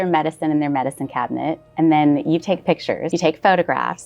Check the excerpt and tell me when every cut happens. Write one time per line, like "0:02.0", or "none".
0:03.0